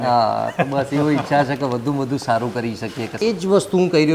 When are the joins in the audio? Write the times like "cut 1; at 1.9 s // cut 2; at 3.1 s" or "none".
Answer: cut 1; at 3.2 s